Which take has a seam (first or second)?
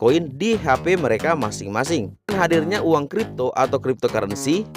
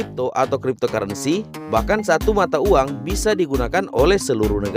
first